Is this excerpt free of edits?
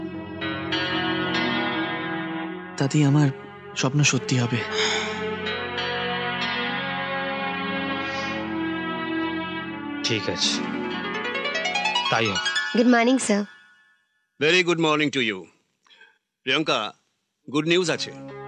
yes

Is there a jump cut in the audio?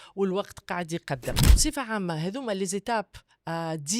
yes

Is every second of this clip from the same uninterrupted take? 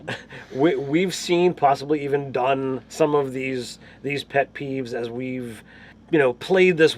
no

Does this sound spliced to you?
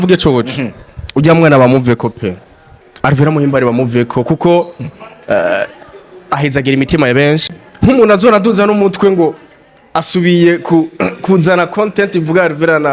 yes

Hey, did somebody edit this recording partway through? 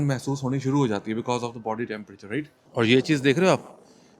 yes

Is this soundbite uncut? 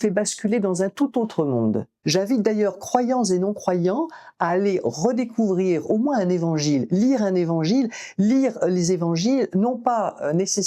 no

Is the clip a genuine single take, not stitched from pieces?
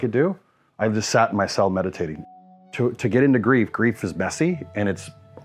no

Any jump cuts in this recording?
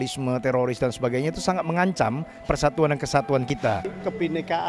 yes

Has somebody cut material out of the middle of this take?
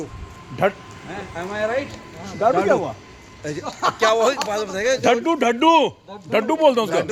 no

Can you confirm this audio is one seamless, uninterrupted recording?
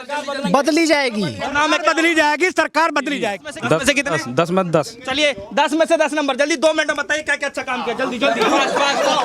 no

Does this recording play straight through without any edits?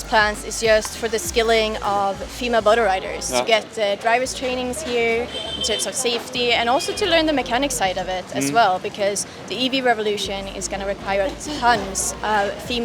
yes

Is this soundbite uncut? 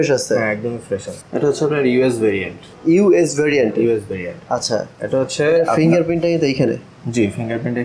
no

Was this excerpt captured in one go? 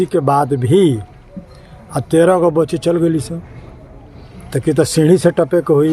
yes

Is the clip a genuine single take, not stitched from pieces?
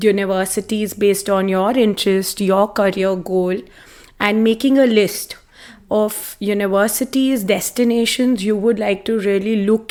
yes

